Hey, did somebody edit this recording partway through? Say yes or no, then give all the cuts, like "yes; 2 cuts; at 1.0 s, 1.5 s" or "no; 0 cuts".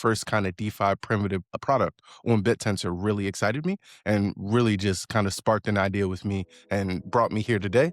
yes; 2 cuts; at 1.6 s, 7.0 s